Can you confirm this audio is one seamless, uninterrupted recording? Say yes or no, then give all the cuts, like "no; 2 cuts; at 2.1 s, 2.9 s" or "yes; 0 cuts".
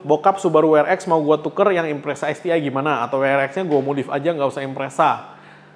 yes; 0 cuts